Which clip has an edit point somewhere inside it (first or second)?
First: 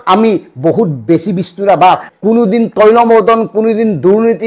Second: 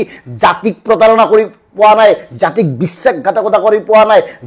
first